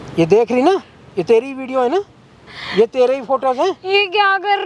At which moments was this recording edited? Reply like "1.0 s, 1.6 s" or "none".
none

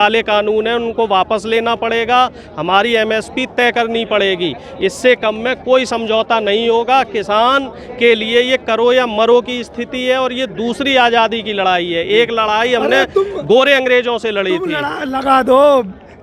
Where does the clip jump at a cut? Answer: none

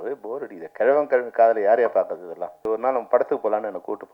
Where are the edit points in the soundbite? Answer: 2.6 s

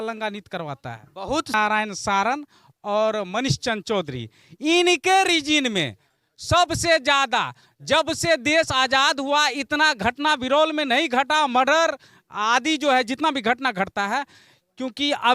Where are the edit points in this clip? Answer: 1.5 s

